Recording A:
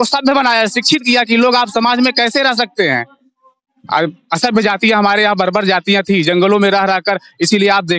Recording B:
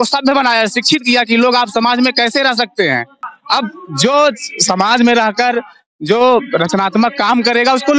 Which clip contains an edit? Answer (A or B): B